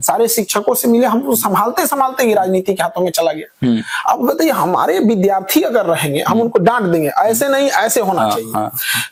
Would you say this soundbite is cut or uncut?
uncut